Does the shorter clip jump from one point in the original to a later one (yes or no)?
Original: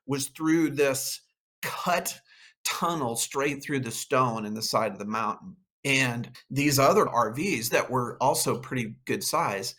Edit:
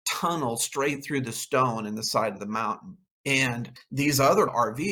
no